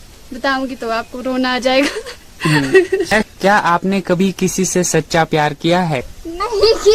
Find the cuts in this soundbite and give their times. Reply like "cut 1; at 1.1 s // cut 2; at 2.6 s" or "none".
cut 1; at 3.1 s // cut 2; at 6.0 s